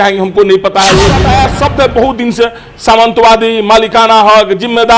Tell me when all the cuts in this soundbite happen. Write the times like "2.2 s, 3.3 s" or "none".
1.2 s